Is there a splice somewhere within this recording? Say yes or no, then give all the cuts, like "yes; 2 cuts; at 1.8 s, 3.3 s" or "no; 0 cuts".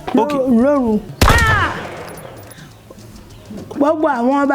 yes; 1 cut; at 1.1 s